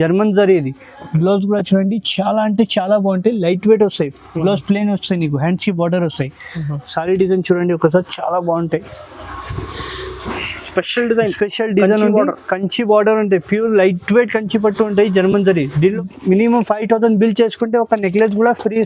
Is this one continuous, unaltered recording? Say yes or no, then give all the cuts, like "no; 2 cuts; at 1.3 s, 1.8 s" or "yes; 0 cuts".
no; 1 cut; at 15.9 s